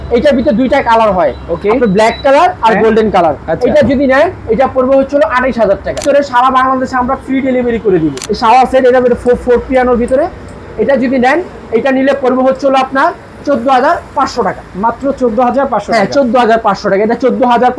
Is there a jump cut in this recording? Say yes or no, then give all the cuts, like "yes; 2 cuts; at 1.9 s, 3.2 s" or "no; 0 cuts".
yes; 2 cuts; at 6.0 s, 8.2 s